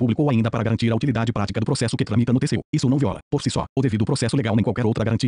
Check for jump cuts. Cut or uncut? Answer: cut